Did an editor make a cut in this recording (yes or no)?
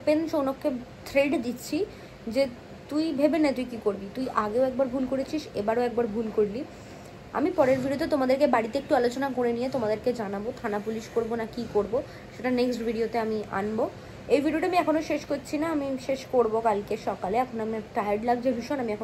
no